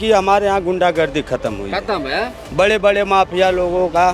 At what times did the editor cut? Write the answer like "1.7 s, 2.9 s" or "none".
none

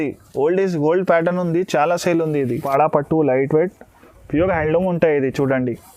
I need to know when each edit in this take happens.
2.6 s

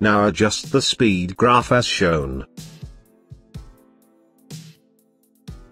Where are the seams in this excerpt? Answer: 2.5 s

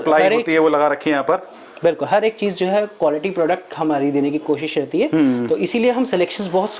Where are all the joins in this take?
none

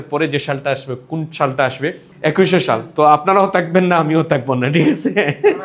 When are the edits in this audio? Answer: 2.1 s

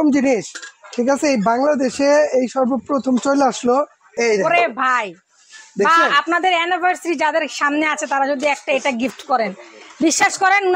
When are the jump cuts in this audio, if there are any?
4.1 s

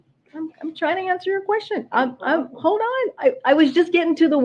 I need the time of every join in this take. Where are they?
2.7 s

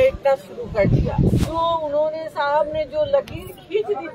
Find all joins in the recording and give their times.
1.4 s

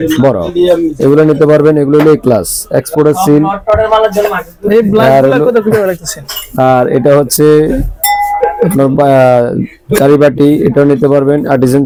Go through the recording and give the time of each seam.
none

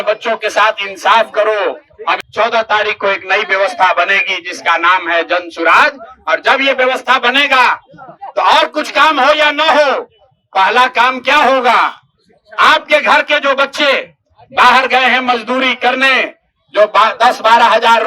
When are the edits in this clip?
2.2 s

